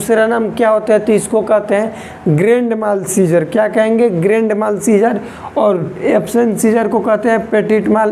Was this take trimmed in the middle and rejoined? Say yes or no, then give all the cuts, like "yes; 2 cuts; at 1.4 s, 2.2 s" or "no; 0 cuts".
no; 0 cuts